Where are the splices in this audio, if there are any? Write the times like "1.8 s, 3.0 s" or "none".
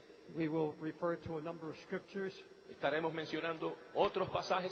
2.1 s